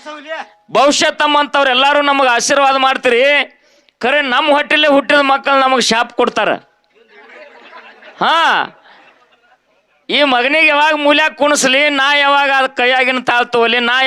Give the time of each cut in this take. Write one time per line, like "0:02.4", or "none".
none